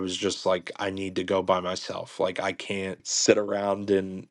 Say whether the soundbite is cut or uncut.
cut